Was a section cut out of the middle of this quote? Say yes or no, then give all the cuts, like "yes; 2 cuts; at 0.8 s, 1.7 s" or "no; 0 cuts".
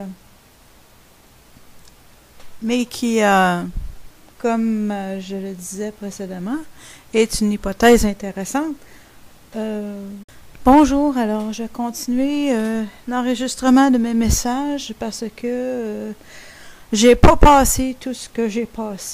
no; 0 cuts